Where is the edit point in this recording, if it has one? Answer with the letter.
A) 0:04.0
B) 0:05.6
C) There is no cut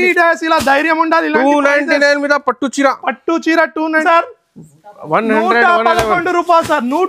A